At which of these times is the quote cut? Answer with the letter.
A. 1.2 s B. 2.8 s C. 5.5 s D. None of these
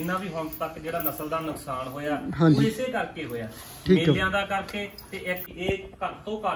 C